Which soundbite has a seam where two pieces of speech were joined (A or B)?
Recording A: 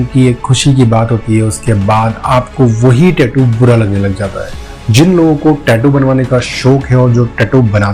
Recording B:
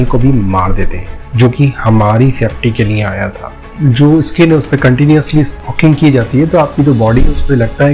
B